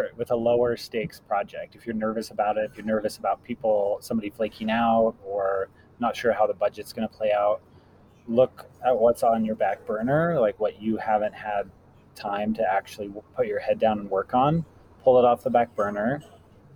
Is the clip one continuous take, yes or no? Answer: yes